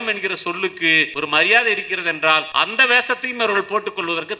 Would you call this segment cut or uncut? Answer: cut